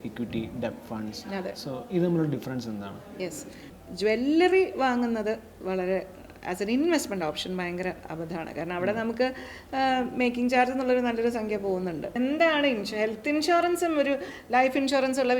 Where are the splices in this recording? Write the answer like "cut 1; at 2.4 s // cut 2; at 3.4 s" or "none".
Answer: cut 1; at 3.7 s // cut 2; at 12.1 s